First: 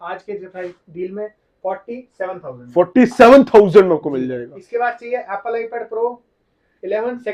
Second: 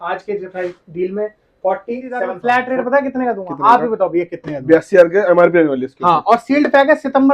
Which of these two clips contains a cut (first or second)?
second